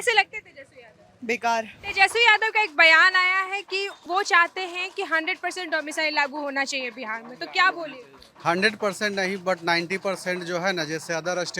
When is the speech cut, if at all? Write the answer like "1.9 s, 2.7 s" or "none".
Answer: 1.8 s, 4.0 s